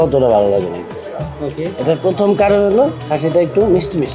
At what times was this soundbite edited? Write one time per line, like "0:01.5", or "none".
none